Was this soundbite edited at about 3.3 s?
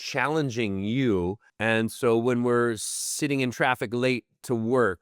no; 1 cut; at 1.5 s

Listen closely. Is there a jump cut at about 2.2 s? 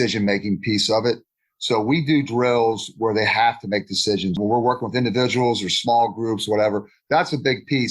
no; 1 cut; at 4.4 s

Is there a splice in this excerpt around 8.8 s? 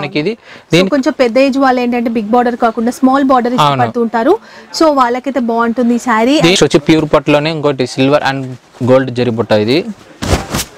no; 1 cut; at 6.6 s

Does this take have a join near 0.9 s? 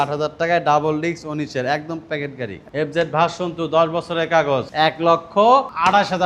no; 1 cut; at 2.5 s

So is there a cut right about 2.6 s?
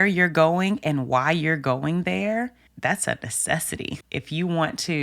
yes; 2 cuts; at 2.6 s, 3.8 s

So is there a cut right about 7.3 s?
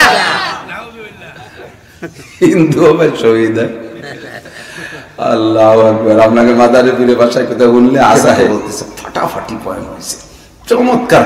no; 1 cut; at 8.5 s

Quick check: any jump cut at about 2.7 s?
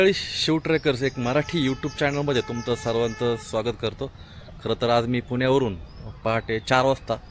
no; 0 cuts

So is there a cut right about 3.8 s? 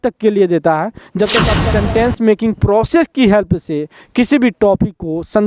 no; 1 cut; at 1.5 s

